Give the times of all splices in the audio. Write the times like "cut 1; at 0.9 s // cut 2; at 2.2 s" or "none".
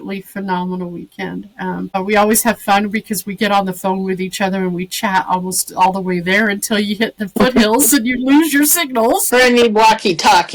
cut 1; at 1.9 s // cut 2; at 9.3 s